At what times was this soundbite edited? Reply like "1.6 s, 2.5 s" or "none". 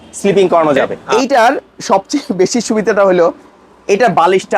1.0 s